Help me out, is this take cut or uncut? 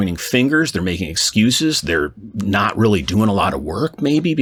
uncut